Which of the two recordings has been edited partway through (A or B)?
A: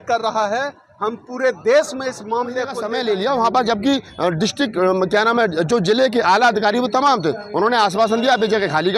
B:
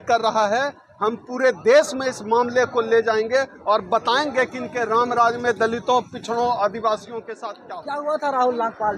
A